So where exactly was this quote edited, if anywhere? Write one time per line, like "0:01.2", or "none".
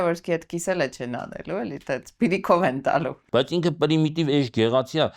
0:03.2